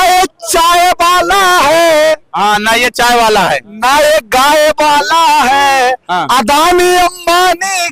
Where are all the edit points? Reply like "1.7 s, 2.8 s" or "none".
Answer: none